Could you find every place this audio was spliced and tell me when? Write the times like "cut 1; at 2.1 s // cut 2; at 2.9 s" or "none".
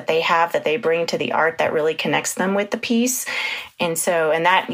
none